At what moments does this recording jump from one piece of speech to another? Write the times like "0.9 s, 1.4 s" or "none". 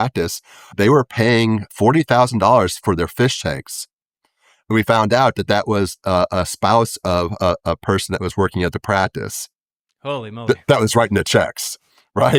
none